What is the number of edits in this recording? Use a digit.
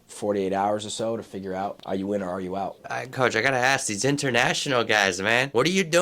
1